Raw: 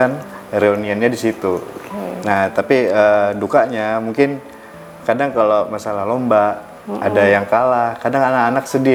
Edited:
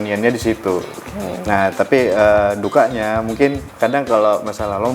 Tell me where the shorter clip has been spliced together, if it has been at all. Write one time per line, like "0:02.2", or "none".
0:03.6